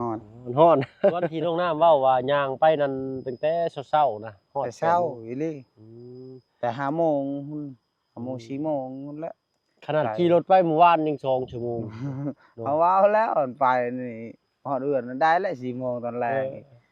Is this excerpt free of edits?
no; 1 cut; at 1.4 s

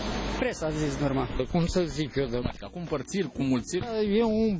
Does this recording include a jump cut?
no; 0 cuts

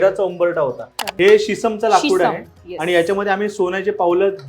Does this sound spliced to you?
yes; 1 cut; at 1.0 s

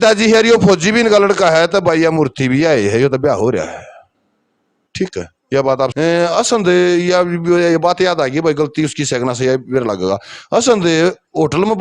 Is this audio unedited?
no; 1 cut; at 5.9 s

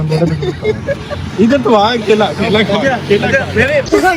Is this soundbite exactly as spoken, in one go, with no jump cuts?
yes; 0 cuts

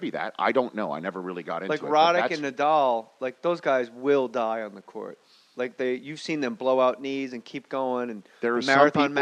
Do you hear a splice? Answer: no; 0 cuts

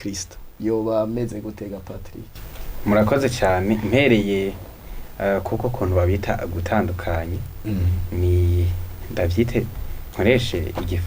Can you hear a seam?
no; 0 cuts

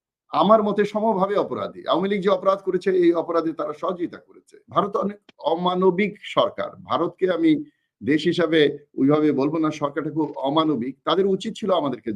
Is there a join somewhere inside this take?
yes; 1 cut; at 4.6 s

